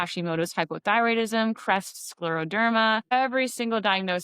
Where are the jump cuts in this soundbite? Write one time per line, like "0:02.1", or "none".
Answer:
0:03.1